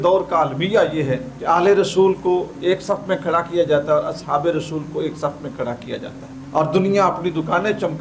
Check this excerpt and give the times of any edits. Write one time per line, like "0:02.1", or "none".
0:01.3